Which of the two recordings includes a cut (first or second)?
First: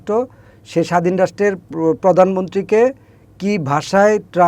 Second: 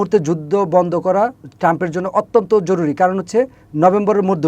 second